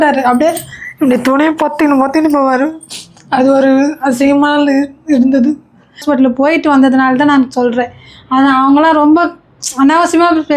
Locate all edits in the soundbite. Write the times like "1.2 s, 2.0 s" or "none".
6.0 s